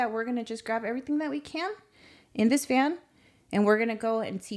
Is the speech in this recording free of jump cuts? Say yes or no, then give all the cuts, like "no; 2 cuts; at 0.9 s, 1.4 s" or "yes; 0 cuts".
yes; 0 cuts